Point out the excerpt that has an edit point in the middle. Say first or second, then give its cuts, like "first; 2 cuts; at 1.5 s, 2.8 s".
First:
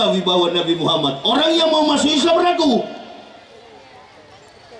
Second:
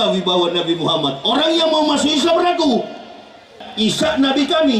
second; 1 cut; at 3.6 s